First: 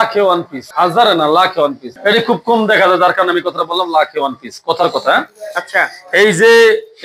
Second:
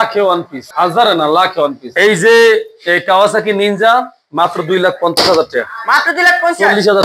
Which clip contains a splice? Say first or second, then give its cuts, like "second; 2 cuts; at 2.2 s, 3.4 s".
second; 1 cut; at 1.8 s